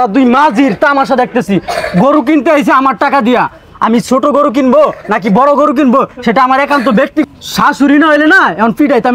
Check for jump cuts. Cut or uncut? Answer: uncut